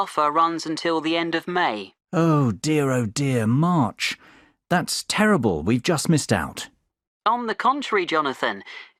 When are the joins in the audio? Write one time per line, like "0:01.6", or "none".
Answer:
none